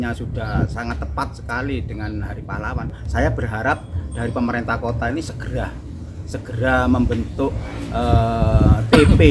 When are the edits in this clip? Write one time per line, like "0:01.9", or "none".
none

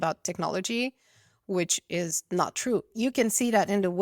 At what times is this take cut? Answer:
0:02.9

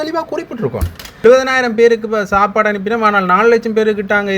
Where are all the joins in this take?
0:01.2

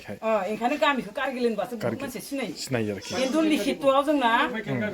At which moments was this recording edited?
none

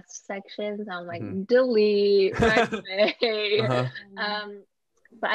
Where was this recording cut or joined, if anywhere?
0:04.4

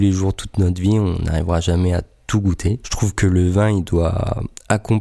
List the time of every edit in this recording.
0:02.9

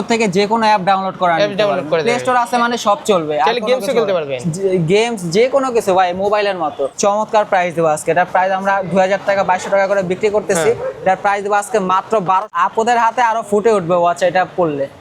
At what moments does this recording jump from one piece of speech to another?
0:06.9
0:12.5

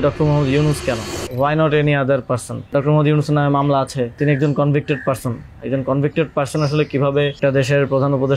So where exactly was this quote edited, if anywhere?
0:01.2
0:02.7
0:04.2
0:07.4

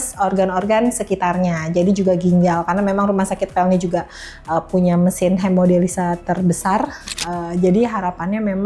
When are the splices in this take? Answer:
0:07.0

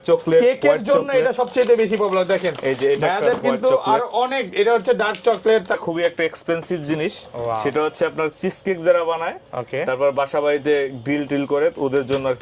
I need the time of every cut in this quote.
0:05.8

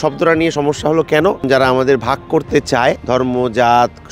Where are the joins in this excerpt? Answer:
0:01.4
0:03.0

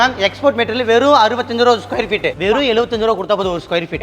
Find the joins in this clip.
0:02.4

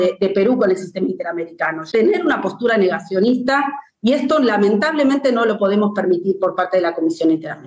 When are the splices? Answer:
0:01.7

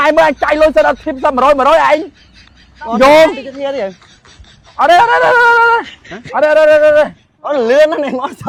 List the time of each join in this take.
none

